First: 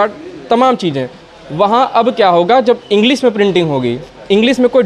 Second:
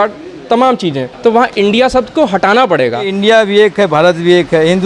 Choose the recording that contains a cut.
second; 2 cuts; at 1.1 s, 3.1 s

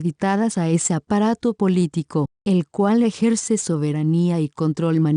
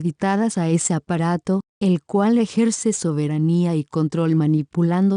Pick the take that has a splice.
second; 1 cut; at 1.1 s

